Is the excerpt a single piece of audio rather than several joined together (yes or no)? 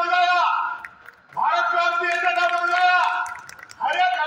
yes